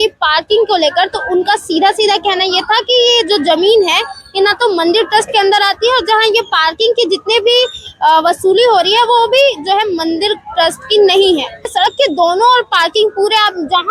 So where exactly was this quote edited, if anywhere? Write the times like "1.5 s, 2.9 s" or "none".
11.7 s